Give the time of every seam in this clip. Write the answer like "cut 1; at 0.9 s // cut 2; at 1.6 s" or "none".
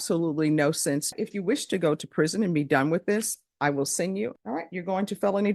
cut 1; at 1.1 s // cut 2; at 4.3 s